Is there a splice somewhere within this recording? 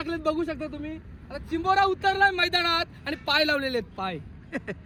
no; 0 cuts

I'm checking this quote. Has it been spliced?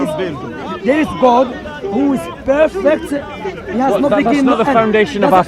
no; 0 cuts

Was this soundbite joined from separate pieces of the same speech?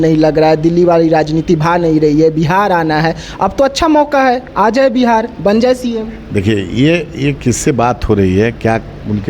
no; 0 cuts

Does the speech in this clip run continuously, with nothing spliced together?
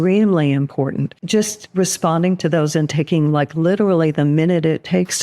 no; 1 cut; at 1.2 s

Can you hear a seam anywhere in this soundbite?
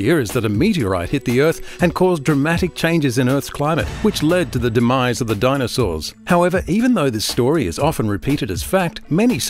yes; 1 cut; at 6.1 s

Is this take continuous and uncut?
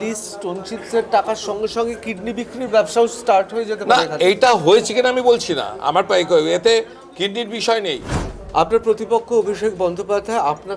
no; 1 cut; at 8.2 s

